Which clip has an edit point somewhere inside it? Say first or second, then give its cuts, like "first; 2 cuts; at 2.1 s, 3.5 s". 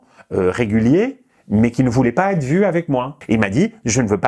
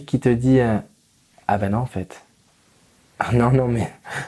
first; 1 cut; at 3.2 s